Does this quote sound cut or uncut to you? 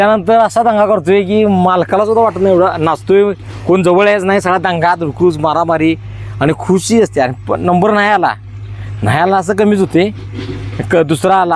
uncut